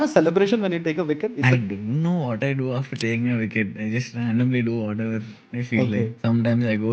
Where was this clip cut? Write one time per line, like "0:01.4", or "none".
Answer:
0:01.4
0:06.1